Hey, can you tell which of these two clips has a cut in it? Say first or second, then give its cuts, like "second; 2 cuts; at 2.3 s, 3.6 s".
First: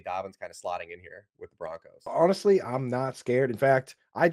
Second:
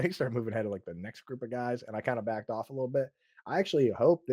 first; 1 cut; at 1.9 s